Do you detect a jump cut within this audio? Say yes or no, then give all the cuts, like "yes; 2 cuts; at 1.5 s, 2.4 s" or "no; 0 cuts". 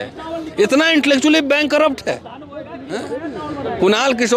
no; 0 cuts